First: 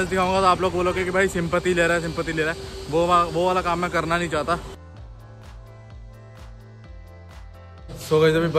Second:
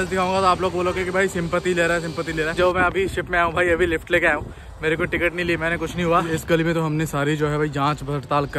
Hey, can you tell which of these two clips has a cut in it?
second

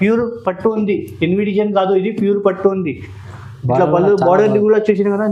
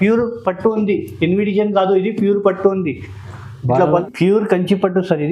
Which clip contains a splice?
second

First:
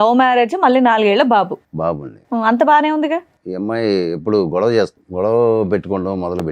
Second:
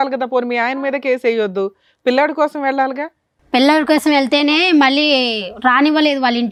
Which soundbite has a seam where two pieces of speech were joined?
first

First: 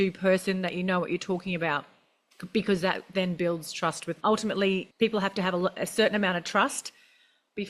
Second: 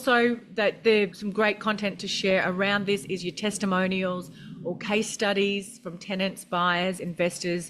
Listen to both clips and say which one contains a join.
second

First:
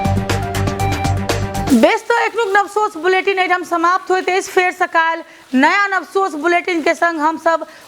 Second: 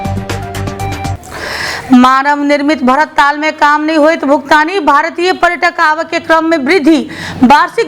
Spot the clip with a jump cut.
second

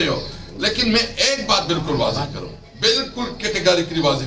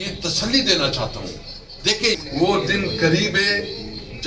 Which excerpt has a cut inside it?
second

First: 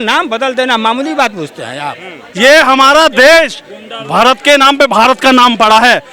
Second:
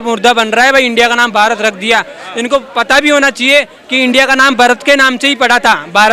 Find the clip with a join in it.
first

